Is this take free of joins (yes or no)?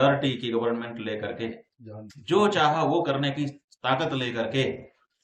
yes